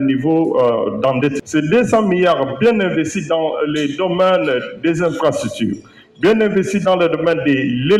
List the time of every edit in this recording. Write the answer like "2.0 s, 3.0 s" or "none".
1.4 s